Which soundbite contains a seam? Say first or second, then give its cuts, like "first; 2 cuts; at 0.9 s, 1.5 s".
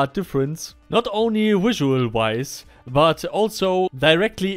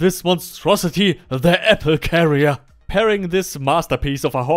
second; 1 cut; at 2.9 s